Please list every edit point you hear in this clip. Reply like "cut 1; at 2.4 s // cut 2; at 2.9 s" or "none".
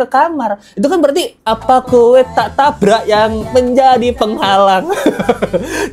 none